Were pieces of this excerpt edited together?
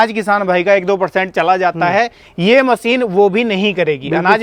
no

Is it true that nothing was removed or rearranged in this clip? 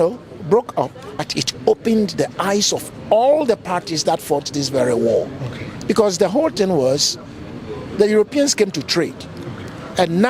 no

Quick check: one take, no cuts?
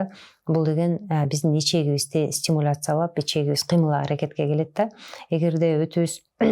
yes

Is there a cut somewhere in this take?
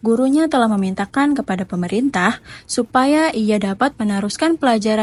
no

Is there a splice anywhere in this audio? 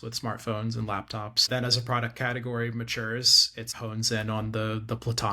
yes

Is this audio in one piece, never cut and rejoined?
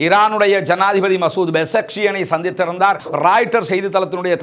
no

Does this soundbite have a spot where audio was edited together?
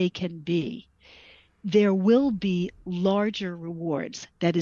no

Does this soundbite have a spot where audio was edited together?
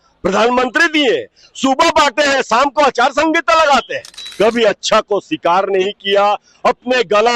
yes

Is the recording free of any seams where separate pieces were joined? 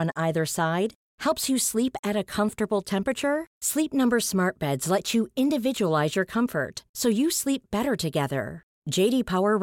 yes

